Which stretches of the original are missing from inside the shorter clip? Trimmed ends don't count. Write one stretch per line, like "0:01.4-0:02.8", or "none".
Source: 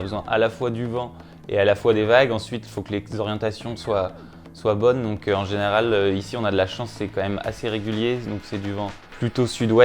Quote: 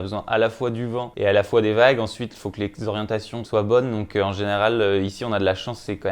0:01.1-0:01.4
0:03.7-0:04.5